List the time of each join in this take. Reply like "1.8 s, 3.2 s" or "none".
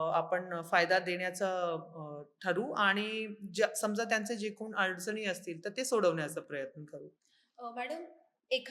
none